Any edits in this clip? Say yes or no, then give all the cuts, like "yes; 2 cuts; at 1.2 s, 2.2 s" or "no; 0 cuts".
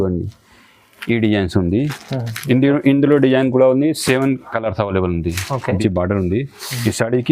yes; 1 cut; at 5.8 s